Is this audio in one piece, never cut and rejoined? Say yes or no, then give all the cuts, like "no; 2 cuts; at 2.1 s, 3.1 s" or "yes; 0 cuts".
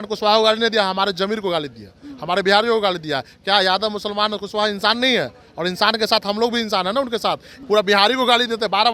no; 1 cut; at 7.5 s